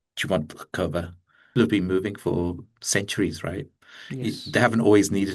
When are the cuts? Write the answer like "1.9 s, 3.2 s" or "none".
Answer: 1.5 s